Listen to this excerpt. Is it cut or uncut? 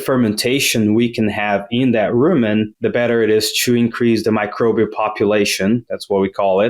cut